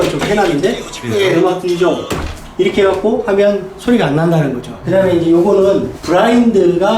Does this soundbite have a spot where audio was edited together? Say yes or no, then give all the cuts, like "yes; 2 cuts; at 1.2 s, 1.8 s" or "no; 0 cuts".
yes; 2 cuts; at 1.0 s, 4.7 s